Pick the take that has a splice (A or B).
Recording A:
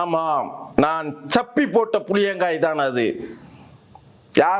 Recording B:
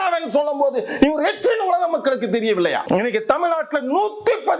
B